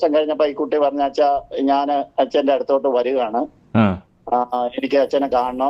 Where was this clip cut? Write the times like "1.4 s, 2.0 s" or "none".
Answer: none